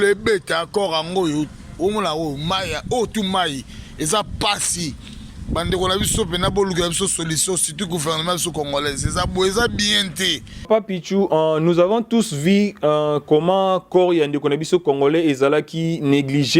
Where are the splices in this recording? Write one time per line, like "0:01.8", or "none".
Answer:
0:10.7